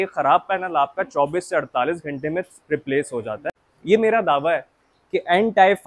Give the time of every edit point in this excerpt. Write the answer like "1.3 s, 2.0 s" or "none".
3.4 s